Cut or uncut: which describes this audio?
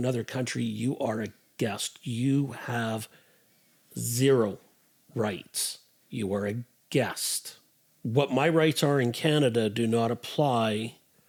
uncut